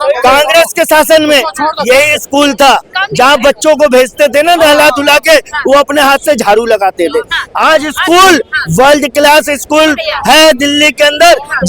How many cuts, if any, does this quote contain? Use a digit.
0